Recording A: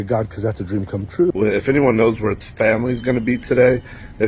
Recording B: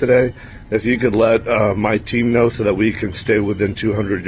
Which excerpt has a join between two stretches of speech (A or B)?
A